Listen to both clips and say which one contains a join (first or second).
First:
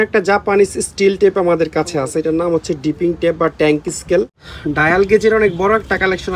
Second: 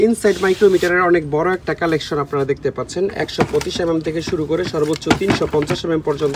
first